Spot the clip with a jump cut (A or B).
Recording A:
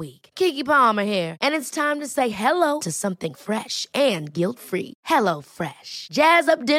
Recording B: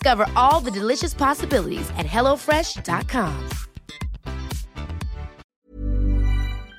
B